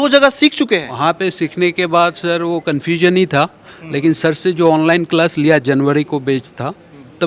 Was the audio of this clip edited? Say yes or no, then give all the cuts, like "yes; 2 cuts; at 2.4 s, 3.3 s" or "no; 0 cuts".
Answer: yes; 1 cut; at 0.9 s